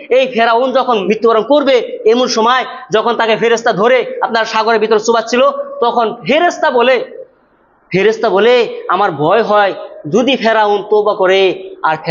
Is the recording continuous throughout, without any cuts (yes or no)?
no